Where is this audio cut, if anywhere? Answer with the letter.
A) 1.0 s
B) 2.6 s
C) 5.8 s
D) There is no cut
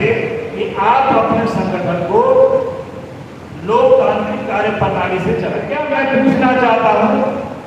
C